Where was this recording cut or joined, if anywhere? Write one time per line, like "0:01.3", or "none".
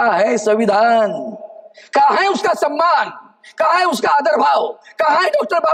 none